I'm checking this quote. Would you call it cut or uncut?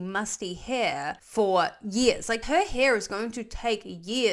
cut